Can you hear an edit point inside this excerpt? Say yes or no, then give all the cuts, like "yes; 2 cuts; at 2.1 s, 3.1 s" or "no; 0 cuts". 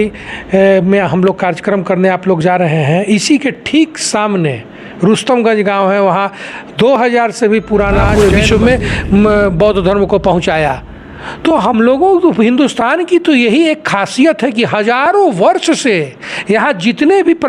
yes; 1 cut; at 8.1 s